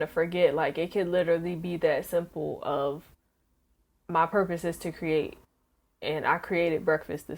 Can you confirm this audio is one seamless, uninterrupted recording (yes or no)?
yes